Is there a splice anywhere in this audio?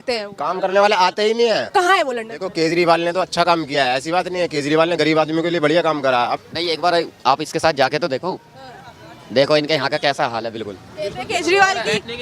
yes; 2 cuts; at 1.7 s, 6.4 s

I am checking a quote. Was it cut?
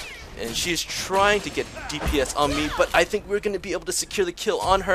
no; 0 cuts

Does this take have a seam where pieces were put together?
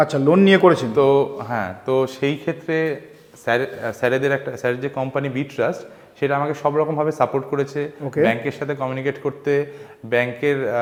no; 0 cuts

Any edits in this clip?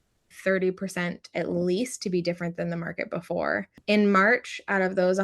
yes; 1 cut; at 3.7 s

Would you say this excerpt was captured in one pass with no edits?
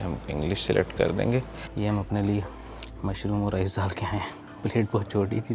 no; 1 cut; at 1.6 s

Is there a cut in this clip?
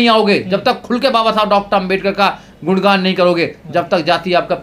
no; 0 cuts

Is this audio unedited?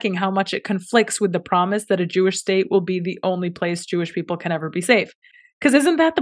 yes; 0 cuts

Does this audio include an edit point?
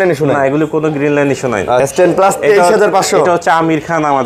yes; 1 cut; at 1.8 s

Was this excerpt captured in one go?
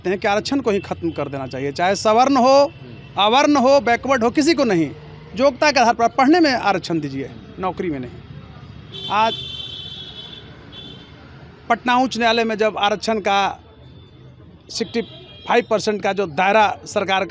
yes; 0 cuts

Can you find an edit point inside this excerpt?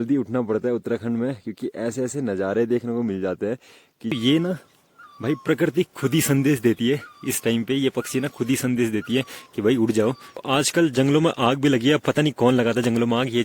yes; 2 cuts; at 4.1 s, 10.4 s

